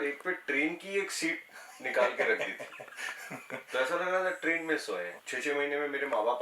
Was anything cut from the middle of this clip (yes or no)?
yes